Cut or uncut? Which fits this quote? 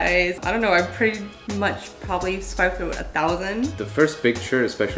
cut